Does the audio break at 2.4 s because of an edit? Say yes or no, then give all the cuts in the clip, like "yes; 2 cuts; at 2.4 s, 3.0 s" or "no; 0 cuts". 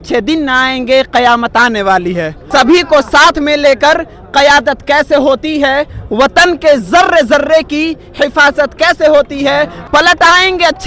yes; 2 cuts; at 2.4 s, 9.8 s